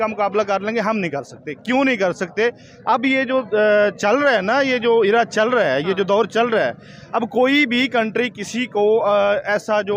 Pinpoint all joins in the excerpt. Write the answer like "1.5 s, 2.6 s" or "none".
none